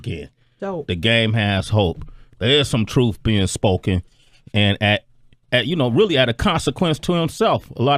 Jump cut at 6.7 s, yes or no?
no